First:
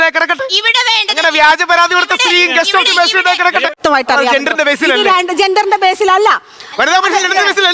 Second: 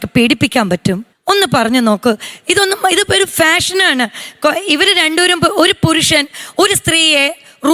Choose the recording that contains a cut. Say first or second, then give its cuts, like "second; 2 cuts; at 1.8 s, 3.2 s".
first; 2 cuts; at 3.8 s, 6.6 s